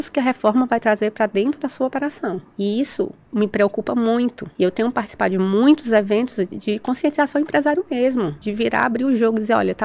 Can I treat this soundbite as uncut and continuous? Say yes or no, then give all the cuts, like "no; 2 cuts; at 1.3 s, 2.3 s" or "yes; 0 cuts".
no; 3 cuts; at 2.5 s, 4.4 s, 8.4 s